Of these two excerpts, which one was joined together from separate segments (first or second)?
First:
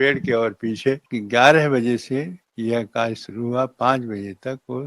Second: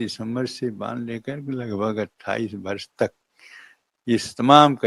first